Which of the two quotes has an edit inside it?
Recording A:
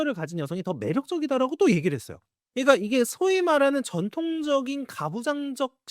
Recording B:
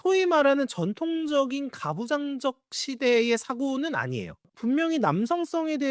B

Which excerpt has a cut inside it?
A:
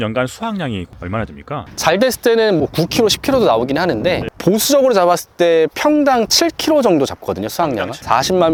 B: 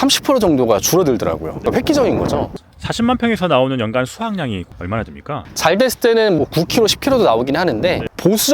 B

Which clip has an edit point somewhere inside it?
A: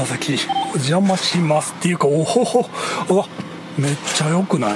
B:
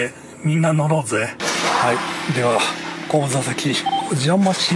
B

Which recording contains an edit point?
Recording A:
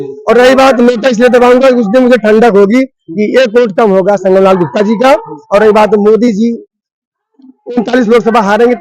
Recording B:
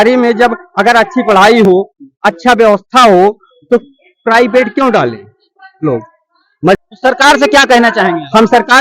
B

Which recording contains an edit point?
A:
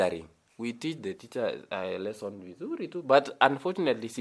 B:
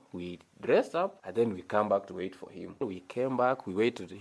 B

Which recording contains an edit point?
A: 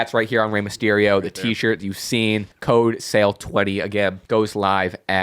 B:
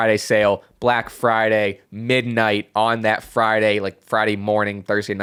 A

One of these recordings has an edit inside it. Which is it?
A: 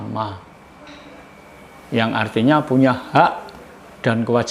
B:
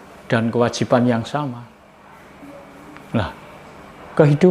B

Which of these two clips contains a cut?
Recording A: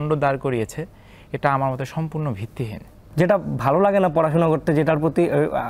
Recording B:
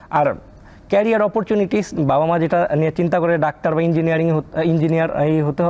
A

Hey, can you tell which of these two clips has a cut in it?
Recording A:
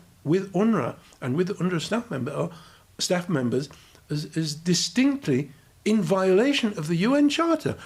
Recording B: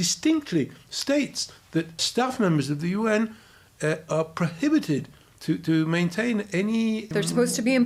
B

